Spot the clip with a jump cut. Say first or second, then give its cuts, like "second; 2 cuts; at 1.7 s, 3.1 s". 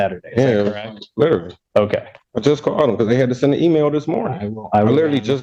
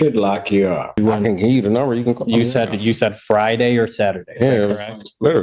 second; 1 cut; at 1.0 s